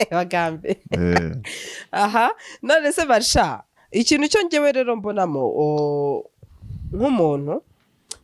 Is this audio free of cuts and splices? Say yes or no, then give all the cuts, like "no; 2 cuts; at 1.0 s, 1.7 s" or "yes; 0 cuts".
yes; 0 cuts